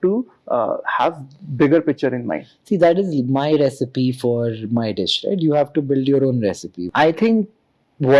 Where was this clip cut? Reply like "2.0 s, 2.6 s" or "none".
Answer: 6.7 s